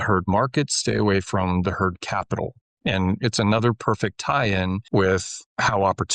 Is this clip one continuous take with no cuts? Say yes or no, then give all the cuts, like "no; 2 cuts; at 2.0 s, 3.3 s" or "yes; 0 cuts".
no; 1 cut; at 4.9 s